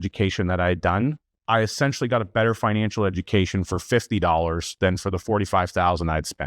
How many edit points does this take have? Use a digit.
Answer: 1